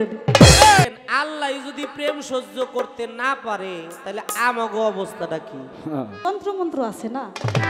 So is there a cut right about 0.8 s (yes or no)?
yes